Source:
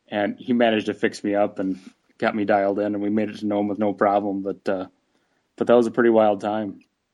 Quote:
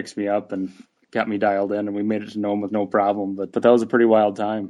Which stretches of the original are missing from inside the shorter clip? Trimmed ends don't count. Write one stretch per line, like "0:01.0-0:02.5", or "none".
0:04.5-0:05.5

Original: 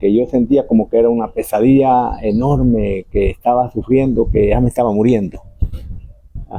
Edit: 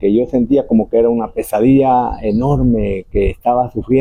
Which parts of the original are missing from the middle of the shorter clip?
none

